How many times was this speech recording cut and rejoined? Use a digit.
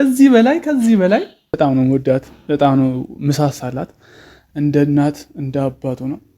1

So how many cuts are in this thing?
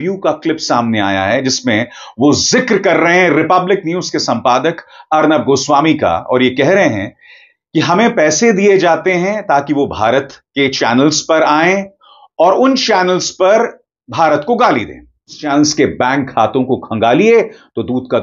1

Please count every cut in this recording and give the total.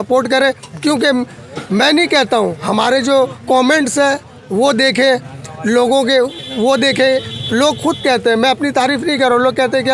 0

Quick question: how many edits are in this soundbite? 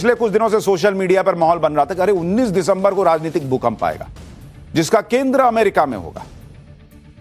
1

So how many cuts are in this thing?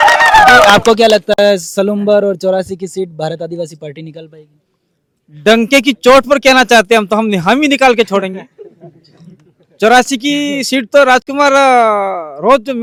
0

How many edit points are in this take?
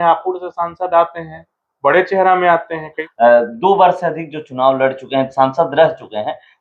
1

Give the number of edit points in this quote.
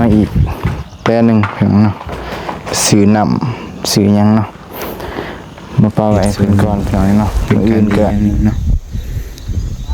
1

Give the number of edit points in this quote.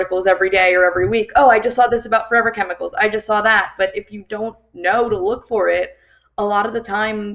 0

